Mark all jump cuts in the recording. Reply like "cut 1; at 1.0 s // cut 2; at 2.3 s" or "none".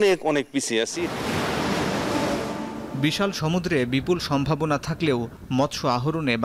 none